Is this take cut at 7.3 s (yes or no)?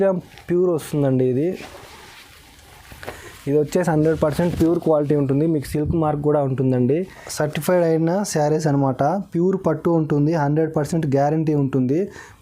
yes